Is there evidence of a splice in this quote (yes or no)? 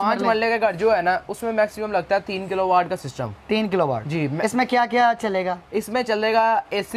no